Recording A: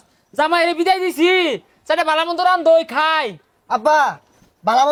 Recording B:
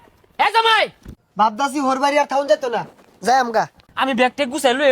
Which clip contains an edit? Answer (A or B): B